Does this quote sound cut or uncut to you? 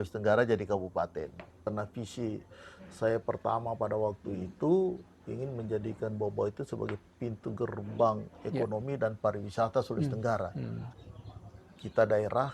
cut